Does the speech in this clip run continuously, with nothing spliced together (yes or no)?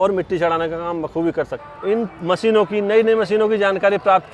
no